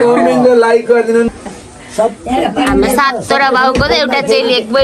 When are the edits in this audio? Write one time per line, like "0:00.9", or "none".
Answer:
0:01.3